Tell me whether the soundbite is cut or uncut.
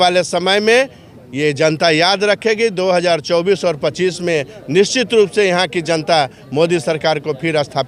uncut